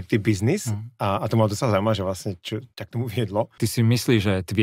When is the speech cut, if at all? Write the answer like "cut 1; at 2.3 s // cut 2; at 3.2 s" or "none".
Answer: cut 1; at 2.7 s // cut 2; at 3.5 s